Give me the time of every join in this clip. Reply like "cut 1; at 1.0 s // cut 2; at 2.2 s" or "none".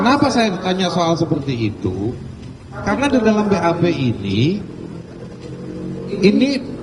none